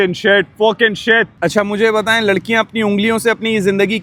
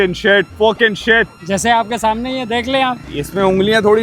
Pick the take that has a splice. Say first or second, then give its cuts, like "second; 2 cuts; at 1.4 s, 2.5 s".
second; 1 cut; at 1.4 s